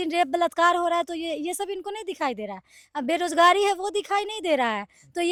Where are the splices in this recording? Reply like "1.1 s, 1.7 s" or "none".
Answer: none